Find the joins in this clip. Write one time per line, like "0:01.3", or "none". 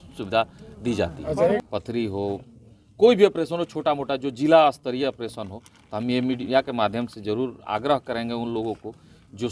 0:01.6